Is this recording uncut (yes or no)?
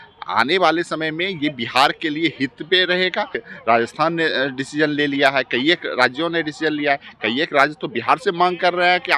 no